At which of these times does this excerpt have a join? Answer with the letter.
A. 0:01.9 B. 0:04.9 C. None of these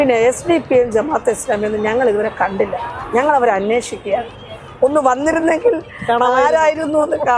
C